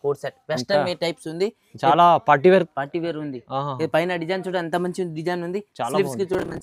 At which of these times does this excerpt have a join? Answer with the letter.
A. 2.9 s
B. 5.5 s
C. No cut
C